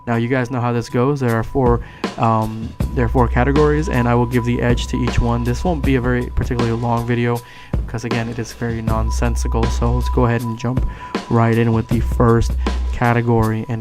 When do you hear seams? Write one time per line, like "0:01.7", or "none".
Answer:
0:06.9